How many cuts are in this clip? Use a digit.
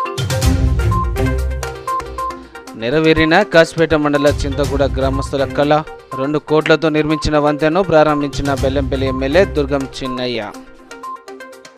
1